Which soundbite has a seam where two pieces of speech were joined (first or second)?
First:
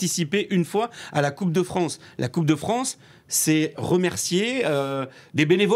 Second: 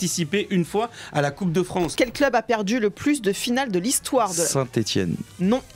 second